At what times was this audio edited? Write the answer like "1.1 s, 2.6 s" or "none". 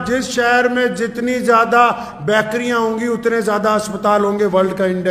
none